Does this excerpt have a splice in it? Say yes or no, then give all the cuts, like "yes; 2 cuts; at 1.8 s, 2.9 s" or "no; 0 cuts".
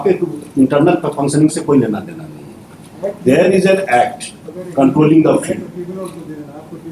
no; 0 cuts